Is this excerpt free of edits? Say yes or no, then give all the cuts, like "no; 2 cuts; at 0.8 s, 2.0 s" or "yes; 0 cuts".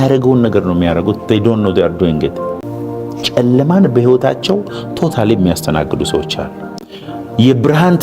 no; 1 cut; at 2.7 s